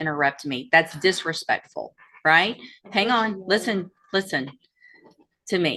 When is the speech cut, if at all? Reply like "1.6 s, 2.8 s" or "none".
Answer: none